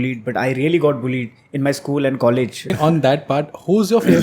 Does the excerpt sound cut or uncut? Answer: cut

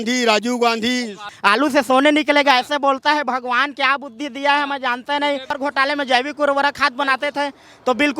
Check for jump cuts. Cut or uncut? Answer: cut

